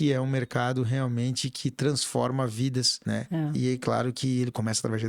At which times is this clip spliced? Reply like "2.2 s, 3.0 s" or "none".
2.9 s

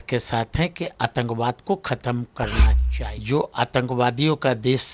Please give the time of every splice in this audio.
2.8 s

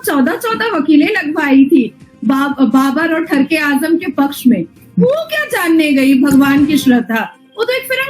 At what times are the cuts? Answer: 7.1 s

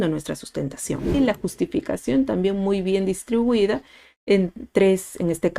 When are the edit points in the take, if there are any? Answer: 1.1 s

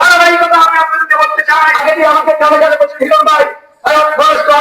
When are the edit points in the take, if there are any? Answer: 1.8 s

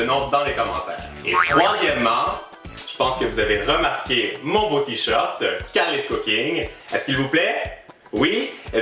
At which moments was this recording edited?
5.3 s

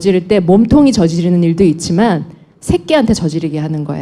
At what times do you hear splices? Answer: 1.3 s

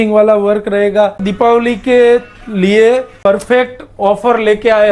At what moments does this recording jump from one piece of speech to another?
1.2 s, 3.2 s

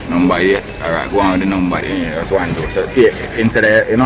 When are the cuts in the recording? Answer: 1.8 s

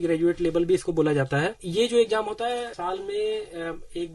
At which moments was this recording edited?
1.6 s, 2.7 s

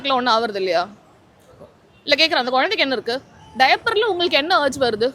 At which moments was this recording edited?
none

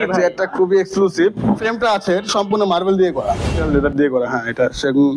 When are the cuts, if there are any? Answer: 1.7 s, 3.6 s

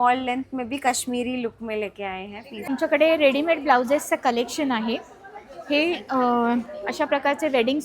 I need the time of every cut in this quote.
2.7 s

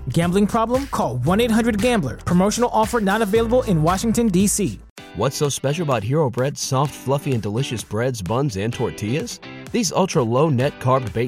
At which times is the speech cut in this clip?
4.8 s

